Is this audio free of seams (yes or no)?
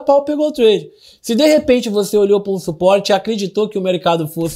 yes